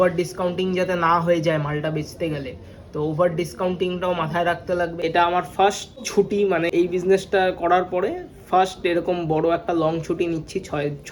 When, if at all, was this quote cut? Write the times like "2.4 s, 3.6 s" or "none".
4.9 s, 6.4 s

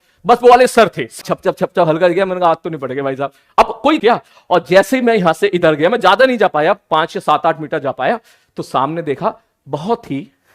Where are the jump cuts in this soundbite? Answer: 1.2 s, 4.0 s

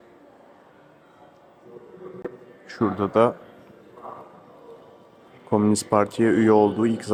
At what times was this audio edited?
none

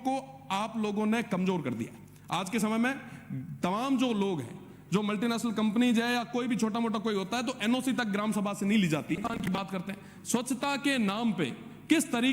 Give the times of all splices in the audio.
9.5 s

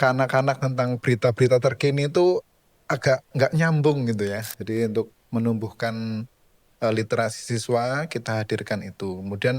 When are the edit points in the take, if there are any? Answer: 4.5 s

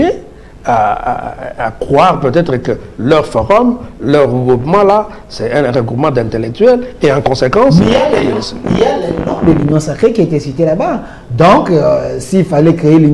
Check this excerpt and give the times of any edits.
none

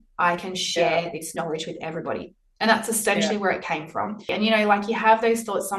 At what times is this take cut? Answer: 4.3 s

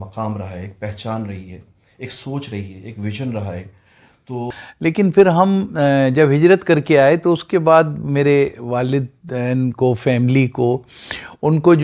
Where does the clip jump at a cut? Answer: 4.5 s

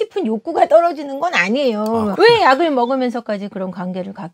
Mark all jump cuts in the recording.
none

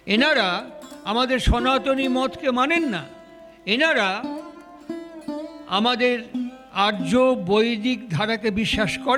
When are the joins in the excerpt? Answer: none

